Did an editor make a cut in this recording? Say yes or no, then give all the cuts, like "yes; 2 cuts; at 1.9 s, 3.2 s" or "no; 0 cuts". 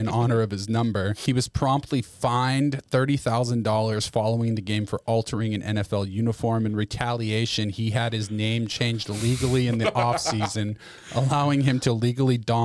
yes; 1 cut; at 1.2 s